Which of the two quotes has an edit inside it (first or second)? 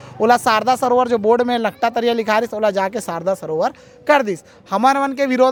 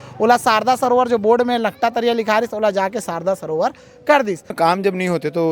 second